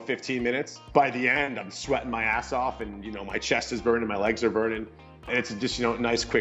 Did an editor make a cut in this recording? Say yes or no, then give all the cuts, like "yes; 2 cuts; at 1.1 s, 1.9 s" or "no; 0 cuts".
yes; 2 cuts; at 0.8 s, 5.2 s